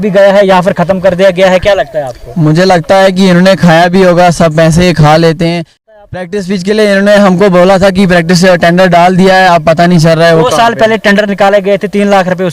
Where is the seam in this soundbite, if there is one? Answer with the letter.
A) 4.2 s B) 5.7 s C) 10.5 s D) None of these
B